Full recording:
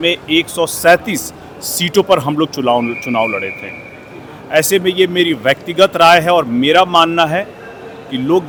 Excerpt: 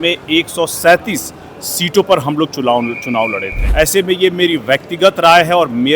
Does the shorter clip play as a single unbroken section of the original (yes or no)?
no